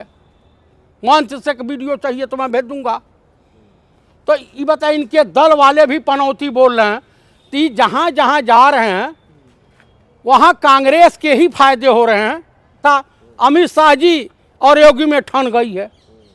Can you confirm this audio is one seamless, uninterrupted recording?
no; 1 cut; at 12.8 s

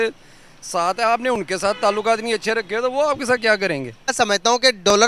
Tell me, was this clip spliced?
yes; 1 cut; at 4.1 s

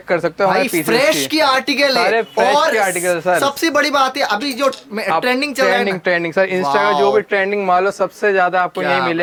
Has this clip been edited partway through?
no; 0 cuts

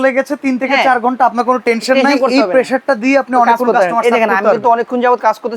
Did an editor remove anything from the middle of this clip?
no; 0 cuts

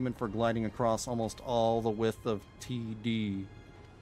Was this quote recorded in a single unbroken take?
yes; 0 cuts

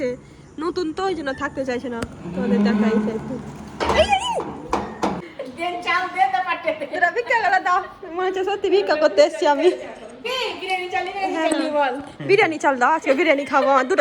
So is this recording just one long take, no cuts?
no; 2 cuts; at 5.2 s, 10.2 s

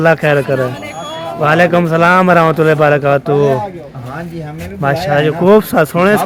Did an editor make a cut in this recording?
no; 0 cuts

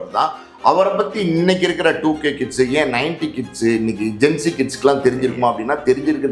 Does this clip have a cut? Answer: no; 0 cuts

